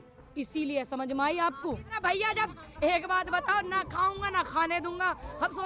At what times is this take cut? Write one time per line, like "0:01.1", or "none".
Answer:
0:01.9